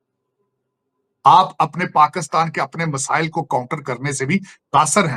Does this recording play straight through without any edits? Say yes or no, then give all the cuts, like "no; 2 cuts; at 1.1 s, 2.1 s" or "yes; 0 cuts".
yes; 0 cuts